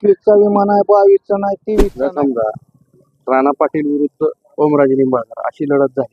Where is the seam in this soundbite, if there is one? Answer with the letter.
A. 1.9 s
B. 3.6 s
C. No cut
A